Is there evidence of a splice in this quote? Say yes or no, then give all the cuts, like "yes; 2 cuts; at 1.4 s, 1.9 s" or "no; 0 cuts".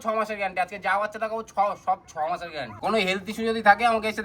yes; 1 cut; at 2.7 s